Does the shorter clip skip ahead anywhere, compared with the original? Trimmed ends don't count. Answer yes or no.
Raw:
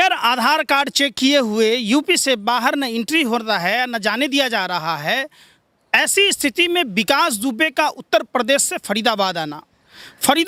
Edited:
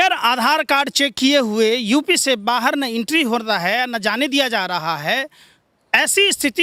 no